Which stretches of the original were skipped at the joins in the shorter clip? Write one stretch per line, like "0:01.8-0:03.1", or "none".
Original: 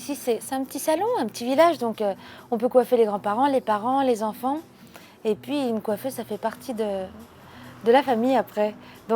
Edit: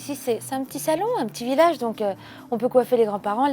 none